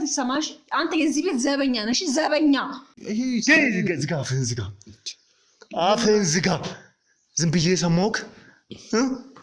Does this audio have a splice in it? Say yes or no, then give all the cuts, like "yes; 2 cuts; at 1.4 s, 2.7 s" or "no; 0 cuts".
yes; 1 cut; at 2.9 s